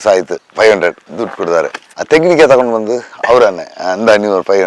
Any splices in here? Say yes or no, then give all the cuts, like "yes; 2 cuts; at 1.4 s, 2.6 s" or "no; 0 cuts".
no; 0 cuts